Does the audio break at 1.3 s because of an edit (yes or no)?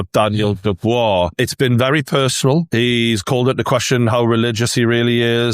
yes